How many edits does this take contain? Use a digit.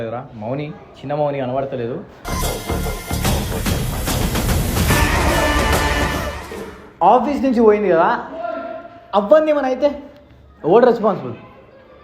1